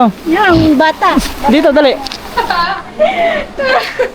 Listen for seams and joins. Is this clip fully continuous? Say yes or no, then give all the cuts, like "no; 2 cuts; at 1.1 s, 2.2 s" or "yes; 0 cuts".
no; 1 cut; at 2.2 s